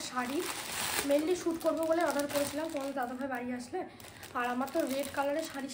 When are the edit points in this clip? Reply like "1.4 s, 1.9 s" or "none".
none